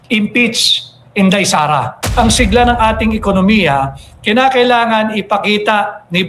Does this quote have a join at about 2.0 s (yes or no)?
yes